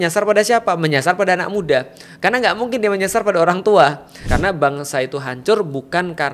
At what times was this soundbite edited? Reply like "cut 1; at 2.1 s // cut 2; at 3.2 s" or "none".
cut 1; at 4.2 s